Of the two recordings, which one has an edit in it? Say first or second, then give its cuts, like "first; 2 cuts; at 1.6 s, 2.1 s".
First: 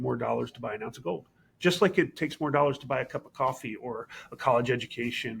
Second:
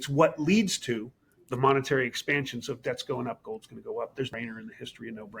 second; 1 cut; at 4.3 s